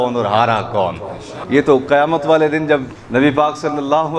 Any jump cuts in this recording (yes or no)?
yes